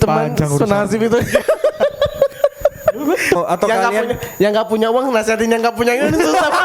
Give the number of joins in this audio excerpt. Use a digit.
1